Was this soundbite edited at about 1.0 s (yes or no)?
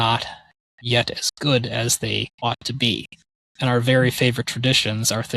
no